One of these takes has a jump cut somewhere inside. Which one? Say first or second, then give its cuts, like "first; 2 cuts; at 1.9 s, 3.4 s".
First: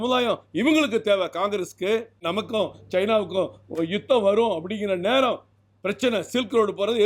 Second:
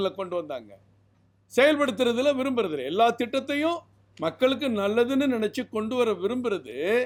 first; 1 cut; at 2.2 s